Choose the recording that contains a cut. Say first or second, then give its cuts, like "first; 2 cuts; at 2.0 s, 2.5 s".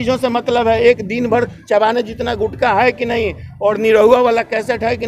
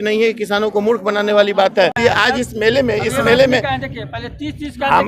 second; 1 cut; at 2.0 s